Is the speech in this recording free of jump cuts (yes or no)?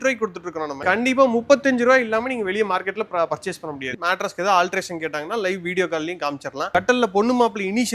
no